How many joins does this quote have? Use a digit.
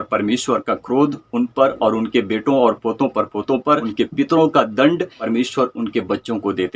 2